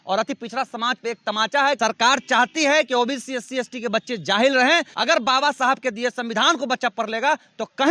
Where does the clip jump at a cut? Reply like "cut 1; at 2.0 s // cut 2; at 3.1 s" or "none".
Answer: cut 1; at 1.8 s // cut 2; at 4.9 s